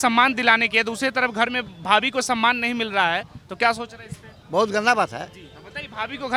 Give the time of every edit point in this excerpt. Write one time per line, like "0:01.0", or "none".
none